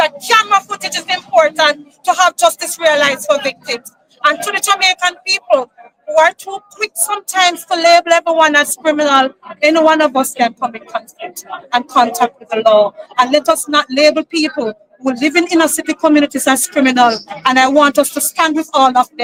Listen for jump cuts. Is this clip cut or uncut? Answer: uncut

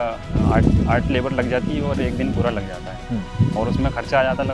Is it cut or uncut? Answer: uncut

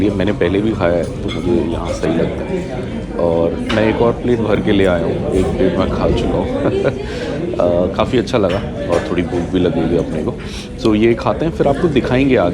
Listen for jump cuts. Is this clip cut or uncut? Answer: uncut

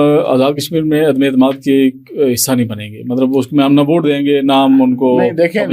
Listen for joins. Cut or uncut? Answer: uncut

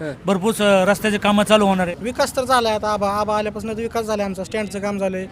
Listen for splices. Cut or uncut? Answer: cut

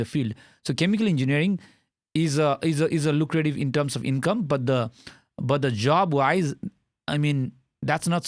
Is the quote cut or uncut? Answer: uncut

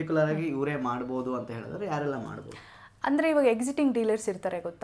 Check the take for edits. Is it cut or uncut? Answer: uncut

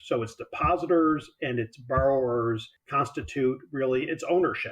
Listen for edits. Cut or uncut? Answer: cut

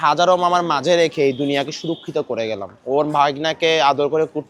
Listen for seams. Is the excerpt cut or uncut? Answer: uncut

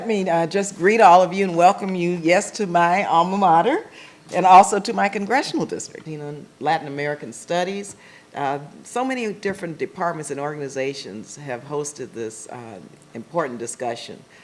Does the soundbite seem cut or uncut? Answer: uncut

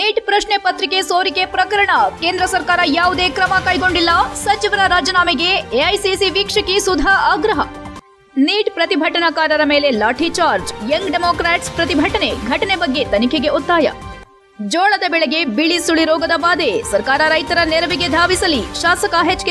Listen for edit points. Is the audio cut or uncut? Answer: uncut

